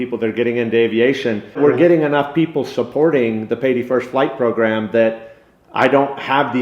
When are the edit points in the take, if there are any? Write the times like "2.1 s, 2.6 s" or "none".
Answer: 1.6 s

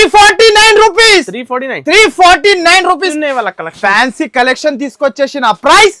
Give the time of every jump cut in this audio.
3.1 s

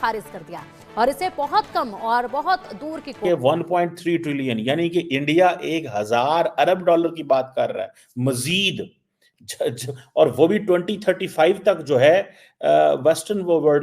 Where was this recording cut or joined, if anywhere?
3.2 s

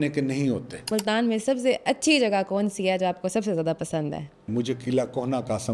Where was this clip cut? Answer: 0.9 s, 4.5 s

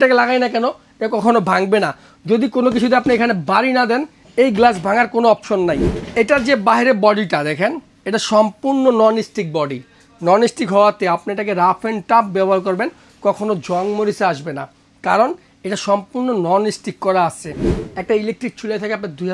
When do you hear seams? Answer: 6.0 s, 17.8 s

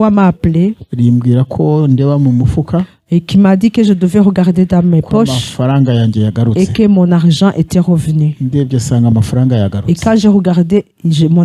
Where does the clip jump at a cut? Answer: none

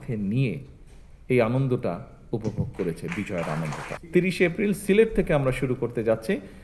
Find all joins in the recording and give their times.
3.9 s

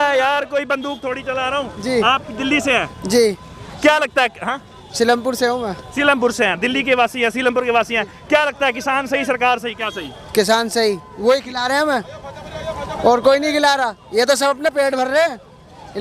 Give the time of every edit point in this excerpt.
none

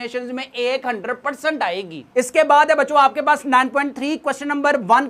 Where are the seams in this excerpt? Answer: none

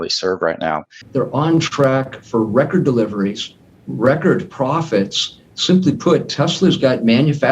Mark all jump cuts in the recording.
0.9 s

